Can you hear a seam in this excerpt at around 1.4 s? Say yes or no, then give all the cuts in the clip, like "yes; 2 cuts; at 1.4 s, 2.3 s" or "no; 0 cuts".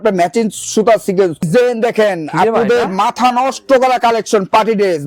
yes; 1 cut; at 1.4 s